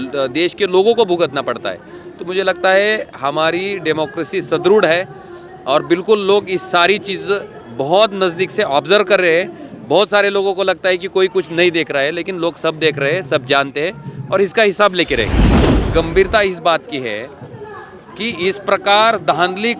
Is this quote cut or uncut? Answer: cut